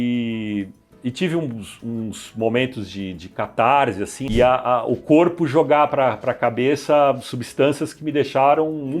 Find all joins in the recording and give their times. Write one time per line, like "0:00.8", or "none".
0:04.2